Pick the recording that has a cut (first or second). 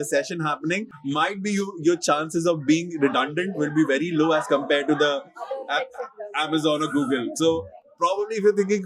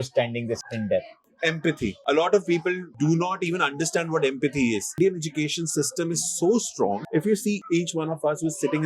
second